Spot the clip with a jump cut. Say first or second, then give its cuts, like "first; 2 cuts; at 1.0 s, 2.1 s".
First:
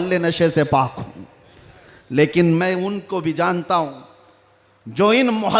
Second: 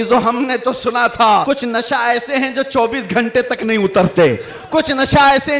second; 1 cut; at 1.4 s